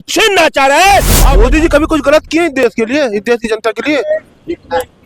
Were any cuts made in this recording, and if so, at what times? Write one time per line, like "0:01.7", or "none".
0:01.2